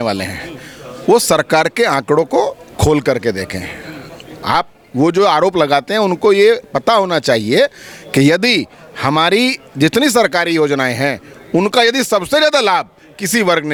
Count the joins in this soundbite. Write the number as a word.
zero